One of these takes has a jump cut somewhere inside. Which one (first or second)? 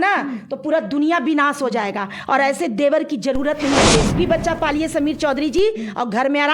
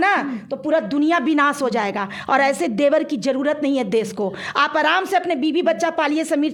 first